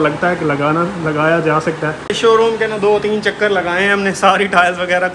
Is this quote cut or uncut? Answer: cut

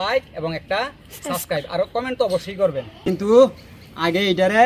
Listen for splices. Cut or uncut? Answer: cut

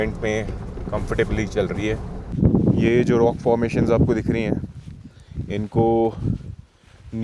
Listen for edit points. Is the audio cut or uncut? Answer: cut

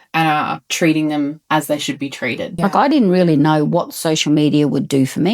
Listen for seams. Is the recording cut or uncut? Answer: cut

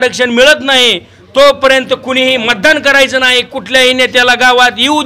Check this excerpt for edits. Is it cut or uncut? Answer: uncut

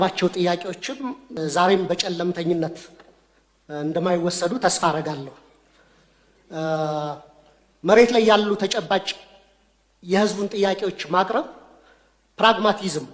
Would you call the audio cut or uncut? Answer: cut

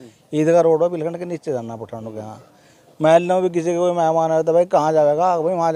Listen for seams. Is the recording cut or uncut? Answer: uncut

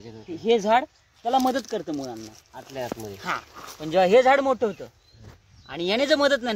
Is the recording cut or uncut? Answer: uncut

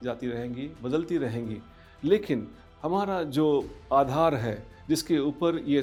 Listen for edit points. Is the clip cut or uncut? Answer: uncut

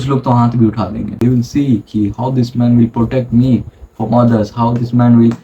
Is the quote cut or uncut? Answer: cut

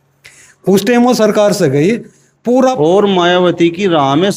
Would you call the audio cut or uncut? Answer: cut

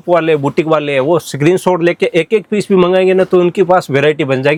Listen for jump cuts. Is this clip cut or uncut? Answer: uncut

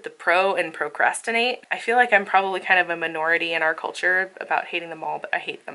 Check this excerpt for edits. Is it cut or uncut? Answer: cut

